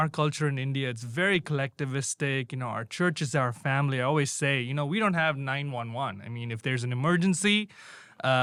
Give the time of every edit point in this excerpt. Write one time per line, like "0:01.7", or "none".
none